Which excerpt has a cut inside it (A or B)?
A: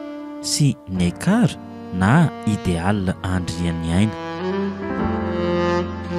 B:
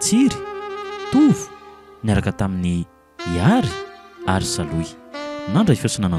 A